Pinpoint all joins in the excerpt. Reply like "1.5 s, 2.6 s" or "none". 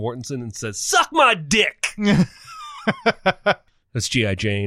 3.6 s